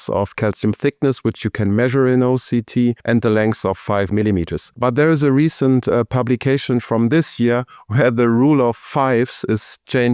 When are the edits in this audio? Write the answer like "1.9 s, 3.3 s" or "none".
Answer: 3.0 s, 4.6 s